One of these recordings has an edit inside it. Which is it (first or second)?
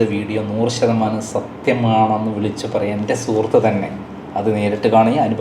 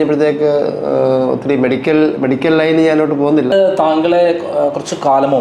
second